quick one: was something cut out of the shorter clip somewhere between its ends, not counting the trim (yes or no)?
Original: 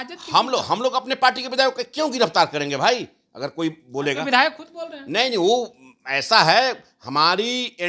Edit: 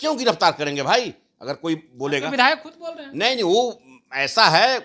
no